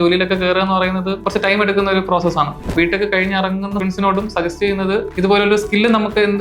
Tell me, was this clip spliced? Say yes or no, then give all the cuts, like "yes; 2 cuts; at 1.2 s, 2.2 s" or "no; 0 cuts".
yes; 4 cuts; at 1.2 s, 2.6 s, 3.8 s, 5.1 s